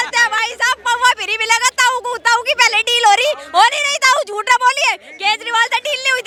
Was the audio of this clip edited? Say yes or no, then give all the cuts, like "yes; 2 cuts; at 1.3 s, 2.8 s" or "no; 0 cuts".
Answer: no; 0 cuts